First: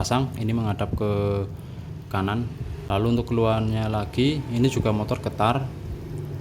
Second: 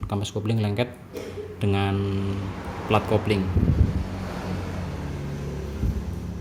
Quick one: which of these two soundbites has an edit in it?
first; 1 cut; at 2.8 s

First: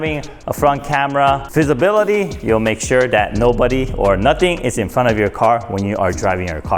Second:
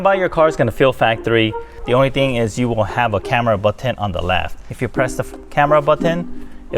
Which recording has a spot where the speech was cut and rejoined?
second; 2 cuts; at 1.8 s, 4.7 s

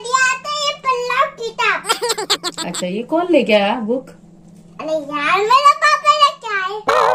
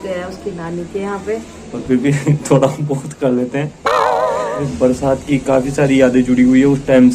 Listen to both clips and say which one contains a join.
second; 2 cuts; at 1.6 s, 4.7 s

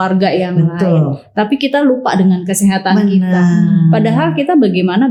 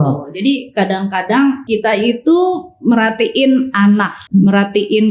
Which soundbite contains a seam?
second; 2 cuts; at 1.6 s, 4.2 s

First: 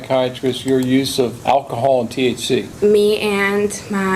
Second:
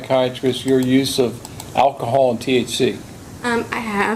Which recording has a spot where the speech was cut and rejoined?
first; 2 cuts; at 1.4 s, 2.7 s

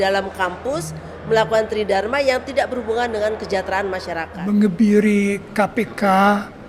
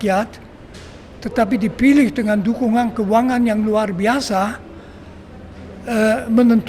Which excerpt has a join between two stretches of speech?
first; 1 cut; at 4.3 s

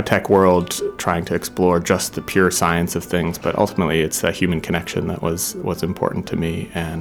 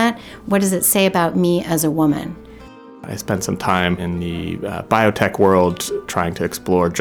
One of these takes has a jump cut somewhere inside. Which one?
second; 2 cuts; at 2.6 s, 4.0 s

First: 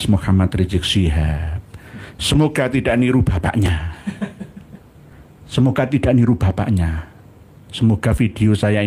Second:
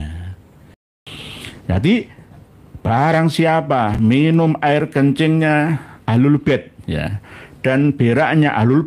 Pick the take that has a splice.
second; 1 cut; at 1.0 s

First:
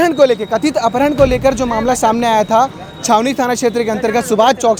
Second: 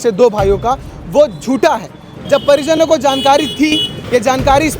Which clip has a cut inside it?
second; 1 cut; at 2.0 s

